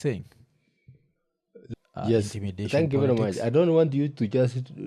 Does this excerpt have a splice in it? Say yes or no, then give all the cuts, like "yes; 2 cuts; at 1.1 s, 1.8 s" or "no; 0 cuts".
yes; 1 cut; at 1.5 s